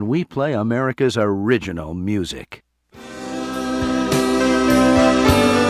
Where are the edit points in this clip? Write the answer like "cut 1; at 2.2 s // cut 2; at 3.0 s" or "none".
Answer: cut 1; at 2.6 s